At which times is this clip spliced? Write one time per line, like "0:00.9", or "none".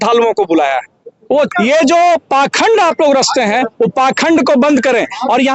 0:01.5